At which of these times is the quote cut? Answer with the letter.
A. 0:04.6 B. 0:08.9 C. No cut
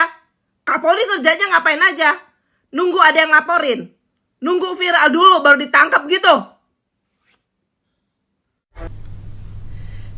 B